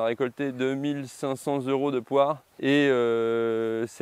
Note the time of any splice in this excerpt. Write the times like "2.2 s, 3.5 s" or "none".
2.5 s